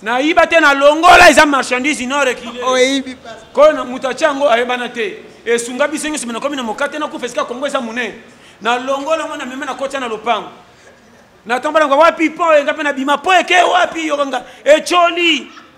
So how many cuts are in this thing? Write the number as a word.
zero